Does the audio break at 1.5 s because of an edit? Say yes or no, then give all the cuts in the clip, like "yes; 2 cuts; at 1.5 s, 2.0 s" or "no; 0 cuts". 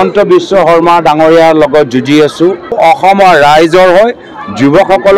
no; 1 cut; at 2.8 s